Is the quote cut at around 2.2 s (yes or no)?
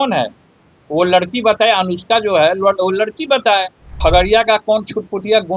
no